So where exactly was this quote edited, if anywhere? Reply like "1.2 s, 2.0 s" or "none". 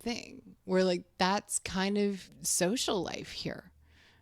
2.4 s